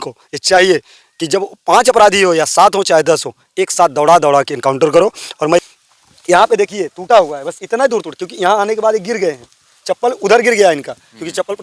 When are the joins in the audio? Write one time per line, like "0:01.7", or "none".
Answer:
0:05.6